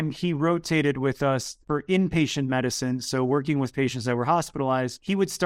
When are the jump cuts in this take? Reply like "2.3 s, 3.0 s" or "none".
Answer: 1.6 s